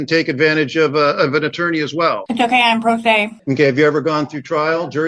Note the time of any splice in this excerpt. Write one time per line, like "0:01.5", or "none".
0:03.3